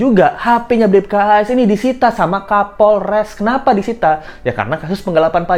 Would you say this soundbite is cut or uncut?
uncut